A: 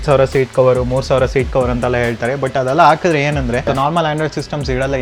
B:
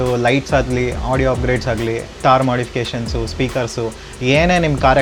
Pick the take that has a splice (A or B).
A